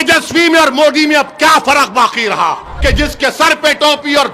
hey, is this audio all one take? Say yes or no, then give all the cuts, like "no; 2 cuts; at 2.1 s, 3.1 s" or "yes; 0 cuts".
no; 1 cut; at 2.7 s